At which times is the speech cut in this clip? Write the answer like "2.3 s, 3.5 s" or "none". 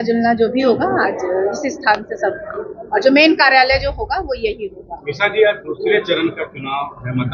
none

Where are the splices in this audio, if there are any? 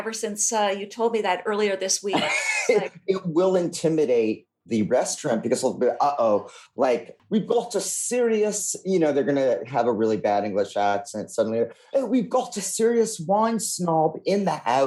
none

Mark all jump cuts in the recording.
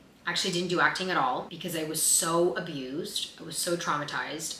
1.6 s

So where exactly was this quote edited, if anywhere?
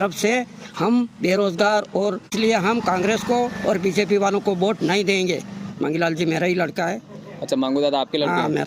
2.3 s

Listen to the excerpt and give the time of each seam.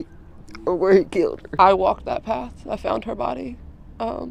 1.4 s

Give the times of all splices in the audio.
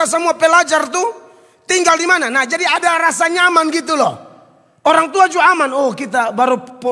none

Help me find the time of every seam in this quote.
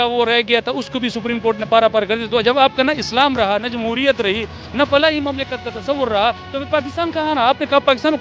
none

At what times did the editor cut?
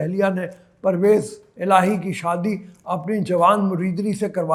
none

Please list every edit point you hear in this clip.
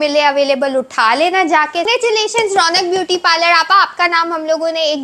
1.9 s

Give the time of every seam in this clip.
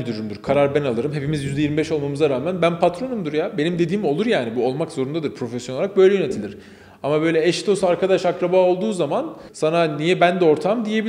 9.4 s

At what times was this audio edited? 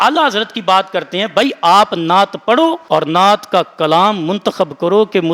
none

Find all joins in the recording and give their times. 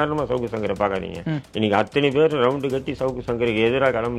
none

